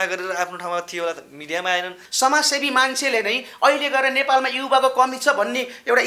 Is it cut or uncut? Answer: cut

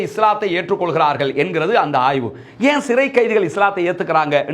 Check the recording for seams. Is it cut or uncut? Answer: uncut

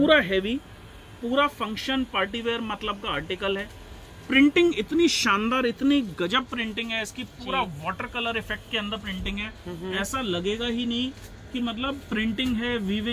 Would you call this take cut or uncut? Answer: uncut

